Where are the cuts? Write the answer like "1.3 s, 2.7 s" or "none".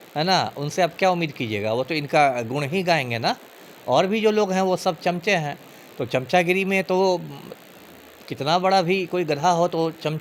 none

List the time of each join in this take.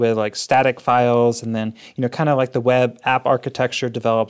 none

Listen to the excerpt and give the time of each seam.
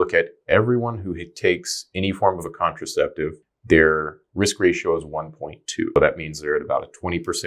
3.5 s, 6.0 s

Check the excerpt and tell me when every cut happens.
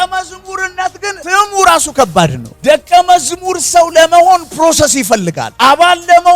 1.2 s, 2.5 s, 5.4 s

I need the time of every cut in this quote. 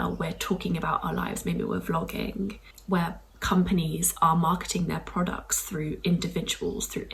none

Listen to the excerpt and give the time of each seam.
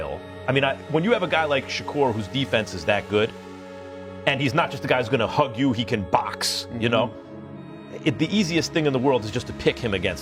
none

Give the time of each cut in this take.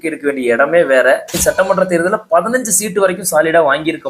1.4 s

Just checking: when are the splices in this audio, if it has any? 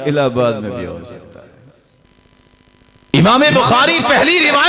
2.0 s

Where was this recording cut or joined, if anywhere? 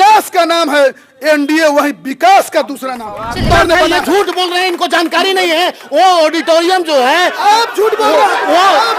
3.5 s

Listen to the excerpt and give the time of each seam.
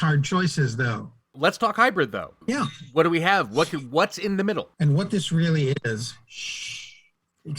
1.2 s, 4.7 s

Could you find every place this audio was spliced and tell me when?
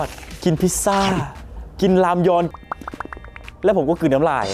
2.5 s

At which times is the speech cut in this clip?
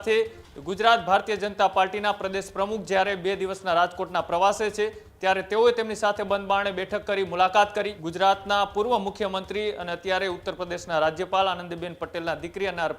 8.0 s

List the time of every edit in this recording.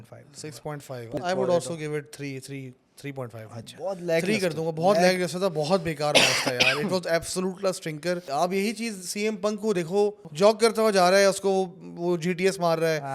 1.2 s, 8.2 s, 10.2 s

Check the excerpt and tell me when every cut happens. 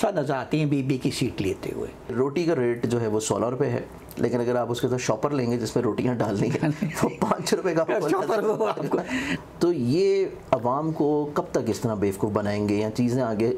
2.1 s, 9.3 s

